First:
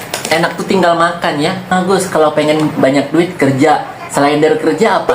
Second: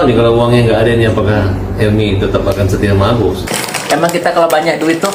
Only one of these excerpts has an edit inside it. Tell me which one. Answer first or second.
first